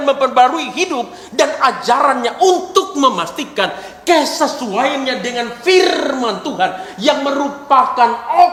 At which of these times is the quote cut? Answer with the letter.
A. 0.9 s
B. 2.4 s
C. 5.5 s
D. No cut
D